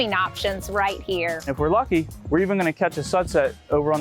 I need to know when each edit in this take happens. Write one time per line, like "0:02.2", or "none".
0:01.5